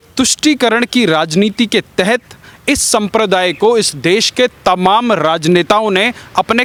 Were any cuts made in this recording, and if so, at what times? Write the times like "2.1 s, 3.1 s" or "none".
none